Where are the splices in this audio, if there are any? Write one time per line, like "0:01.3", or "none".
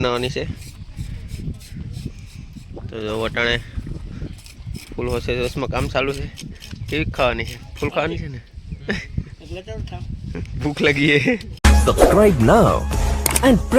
0:11.5